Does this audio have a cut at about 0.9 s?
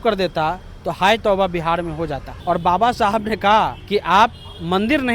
no; 2 cuts; at 2.3 s, 3.8 s

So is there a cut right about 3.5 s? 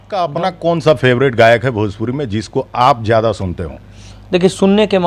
no; 0 cuts

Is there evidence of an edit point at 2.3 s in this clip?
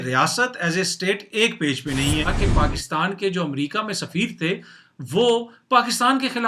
yes; 1 cut; at 2.3 s

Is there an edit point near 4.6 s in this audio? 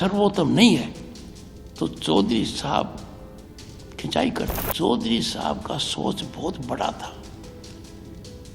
yes; 1 cut; at 4.6 s

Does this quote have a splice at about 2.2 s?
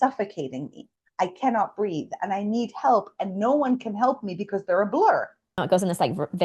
no; 1 cut; at 5.6 s

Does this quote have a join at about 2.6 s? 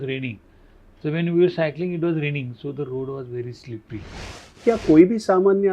no; 1 cut; at 4.6 s

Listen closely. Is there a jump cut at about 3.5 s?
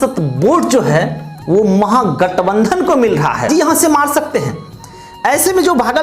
yes; 1 cut; at 3.5 s

